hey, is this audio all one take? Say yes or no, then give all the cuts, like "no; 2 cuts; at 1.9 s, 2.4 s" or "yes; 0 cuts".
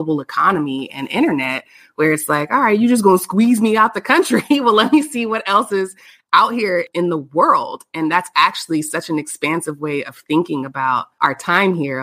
no; 1 cut; at 11.1 s